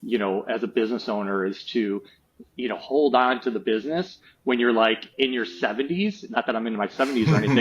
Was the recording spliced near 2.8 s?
yes; 1 cut; at 2.8 s

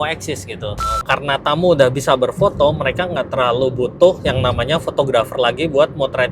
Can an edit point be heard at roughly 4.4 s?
no; 1 cut; at 0.9 s

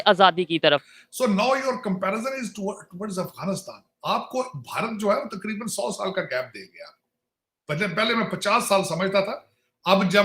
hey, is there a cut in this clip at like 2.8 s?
no; 1 cut; at 0.9 s

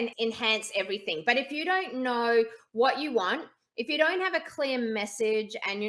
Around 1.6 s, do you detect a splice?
no; 0 cuts

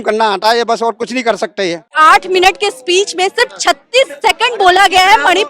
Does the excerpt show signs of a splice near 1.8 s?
yes; 1 cut; at 1.8 s

